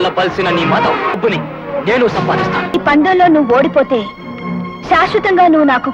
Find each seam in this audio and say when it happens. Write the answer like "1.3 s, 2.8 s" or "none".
1.2 s, 2.7 s